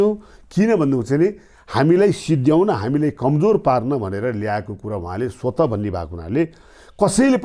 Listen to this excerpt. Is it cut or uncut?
uncut